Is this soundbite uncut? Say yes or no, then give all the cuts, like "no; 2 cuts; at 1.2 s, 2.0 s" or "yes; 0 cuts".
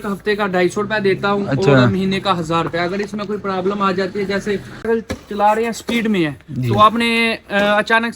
no; 1 cut; at 4.8 s